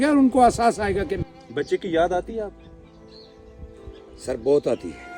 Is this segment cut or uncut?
cut